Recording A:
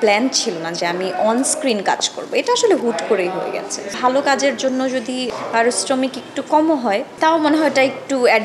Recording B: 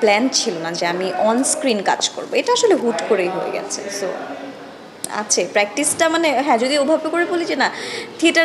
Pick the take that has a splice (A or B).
A